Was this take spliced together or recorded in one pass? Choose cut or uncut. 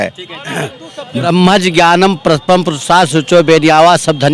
cut